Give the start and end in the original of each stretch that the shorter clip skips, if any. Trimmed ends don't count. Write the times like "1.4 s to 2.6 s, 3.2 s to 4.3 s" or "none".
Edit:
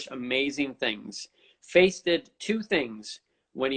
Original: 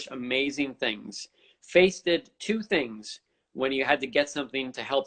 none